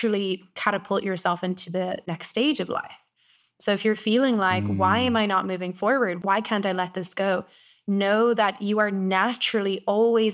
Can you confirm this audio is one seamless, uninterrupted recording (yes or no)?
no